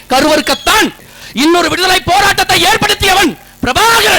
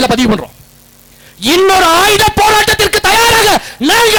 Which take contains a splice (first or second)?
first